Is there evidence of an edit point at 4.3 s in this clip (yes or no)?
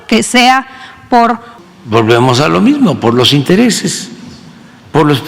no